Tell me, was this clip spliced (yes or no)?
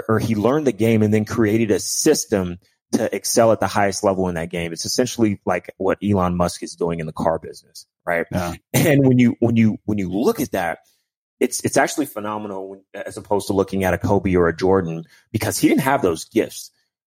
no